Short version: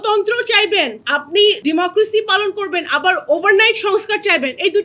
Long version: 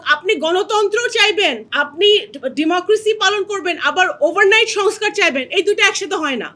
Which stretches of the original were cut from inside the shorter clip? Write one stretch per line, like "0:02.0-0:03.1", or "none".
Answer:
0:02.3-0:02.5